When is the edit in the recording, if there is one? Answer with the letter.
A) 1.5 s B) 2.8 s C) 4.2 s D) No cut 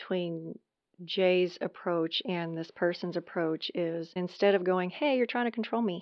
C